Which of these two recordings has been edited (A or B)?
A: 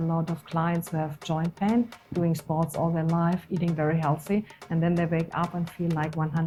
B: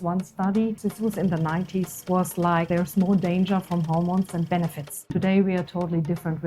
B